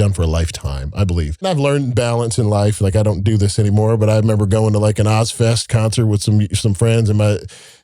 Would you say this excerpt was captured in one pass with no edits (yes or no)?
no